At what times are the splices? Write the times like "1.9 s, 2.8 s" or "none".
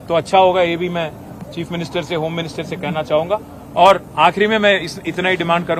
none